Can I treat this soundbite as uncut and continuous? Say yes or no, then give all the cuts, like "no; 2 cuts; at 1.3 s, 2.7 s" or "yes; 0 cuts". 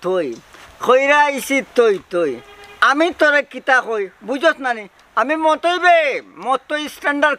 yes; 0 cuts